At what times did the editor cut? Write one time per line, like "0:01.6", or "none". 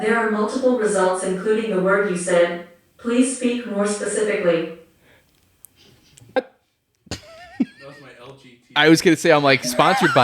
0:06.4